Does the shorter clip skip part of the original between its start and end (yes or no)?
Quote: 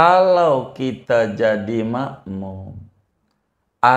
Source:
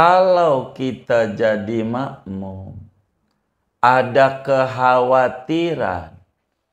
no